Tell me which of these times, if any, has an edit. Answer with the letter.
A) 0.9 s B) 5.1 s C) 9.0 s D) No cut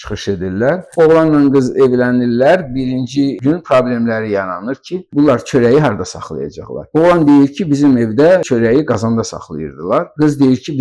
A